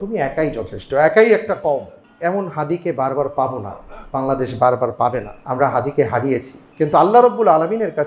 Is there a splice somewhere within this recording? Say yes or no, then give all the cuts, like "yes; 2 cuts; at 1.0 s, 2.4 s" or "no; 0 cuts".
yes; 3 cuts; at 2.0 s, 5.3 s, 6.6 s